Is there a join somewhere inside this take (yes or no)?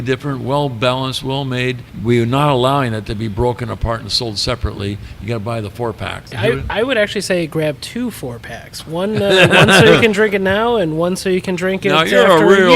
yes